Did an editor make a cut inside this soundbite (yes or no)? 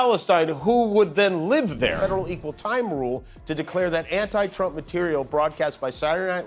yes